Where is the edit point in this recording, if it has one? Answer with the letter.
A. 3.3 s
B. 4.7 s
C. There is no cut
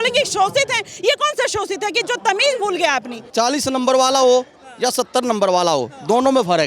A